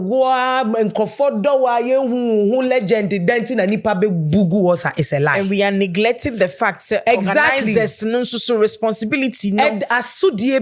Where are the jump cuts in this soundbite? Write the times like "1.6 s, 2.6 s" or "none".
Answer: none